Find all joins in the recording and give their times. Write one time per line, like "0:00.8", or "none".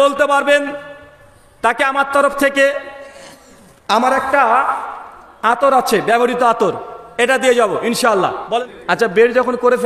0:08.6